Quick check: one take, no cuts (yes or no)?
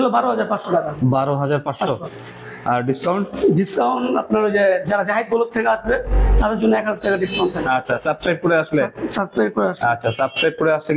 yes